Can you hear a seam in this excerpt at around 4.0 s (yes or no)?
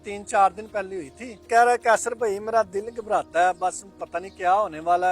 no